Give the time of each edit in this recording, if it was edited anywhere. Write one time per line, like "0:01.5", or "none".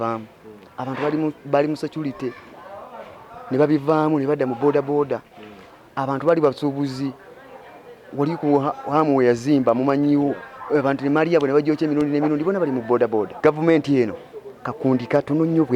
0:13.3